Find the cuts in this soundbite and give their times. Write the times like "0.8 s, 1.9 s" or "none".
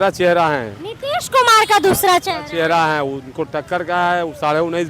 none